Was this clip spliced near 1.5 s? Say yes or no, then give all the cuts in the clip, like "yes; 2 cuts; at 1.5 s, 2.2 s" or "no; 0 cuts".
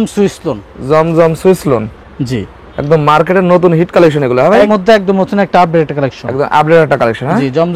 no; 1 cut; at 4.7 s